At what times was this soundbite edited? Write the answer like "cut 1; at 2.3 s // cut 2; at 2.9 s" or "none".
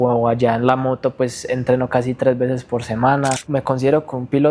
cut 1; at 3.4 s